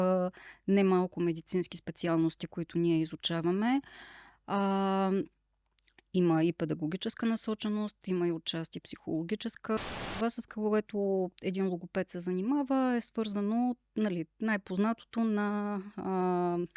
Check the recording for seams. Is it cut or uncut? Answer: cut